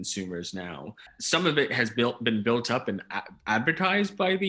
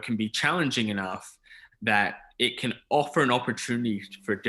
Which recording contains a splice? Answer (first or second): first